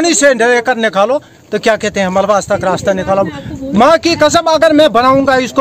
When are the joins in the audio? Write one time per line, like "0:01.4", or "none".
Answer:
none